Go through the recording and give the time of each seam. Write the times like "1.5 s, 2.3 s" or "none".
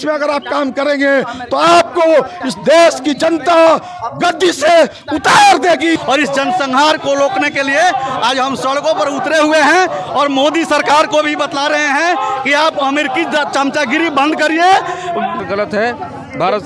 5.9 s, 15.4 s